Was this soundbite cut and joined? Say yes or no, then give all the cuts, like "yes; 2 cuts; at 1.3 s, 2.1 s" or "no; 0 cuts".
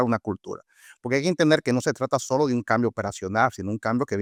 no; 0 cuts